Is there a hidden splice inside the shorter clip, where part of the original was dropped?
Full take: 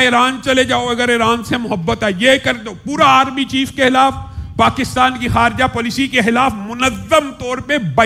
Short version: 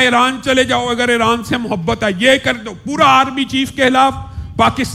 no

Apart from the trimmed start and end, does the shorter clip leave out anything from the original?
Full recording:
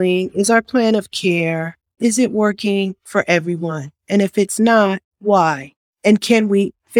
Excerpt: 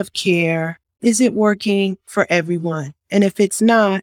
no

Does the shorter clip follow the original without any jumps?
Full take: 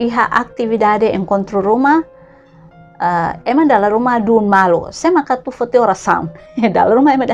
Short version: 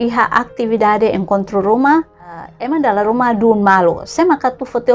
no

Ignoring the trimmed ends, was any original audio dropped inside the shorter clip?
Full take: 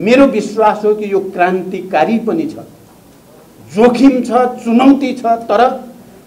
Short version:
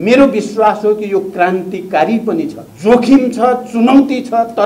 yes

